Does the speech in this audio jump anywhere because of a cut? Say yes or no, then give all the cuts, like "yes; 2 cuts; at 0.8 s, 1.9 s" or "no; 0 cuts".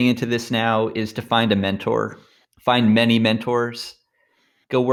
no; 0 cuts